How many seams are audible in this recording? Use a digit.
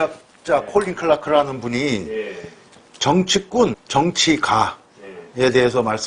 1